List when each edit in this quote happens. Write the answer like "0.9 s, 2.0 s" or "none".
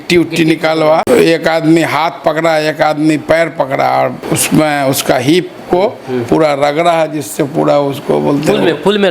1.0 s, 4.3 s